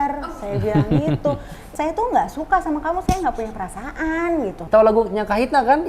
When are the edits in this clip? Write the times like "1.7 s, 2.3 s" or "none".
1.6 s, 4.6 s